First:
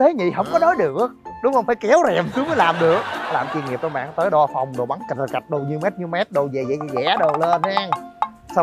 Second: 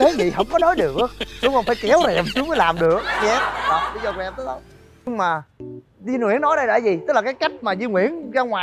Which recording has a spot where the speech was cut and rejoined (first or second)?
first